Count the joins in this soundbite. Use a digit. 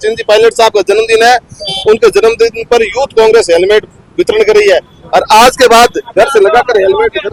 0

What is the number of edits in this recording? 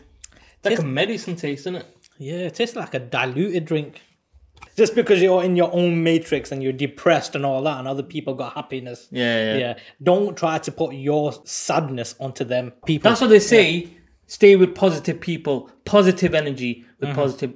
2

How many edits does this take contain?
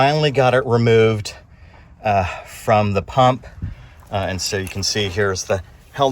0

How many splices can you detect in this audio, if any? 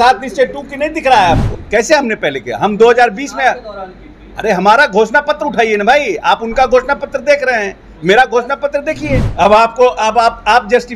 2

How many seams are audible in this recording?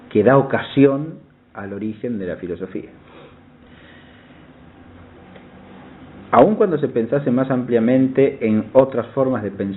1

